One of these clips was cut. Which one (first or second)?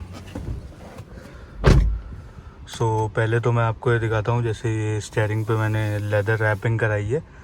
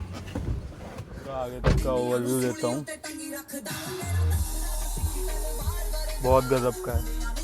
second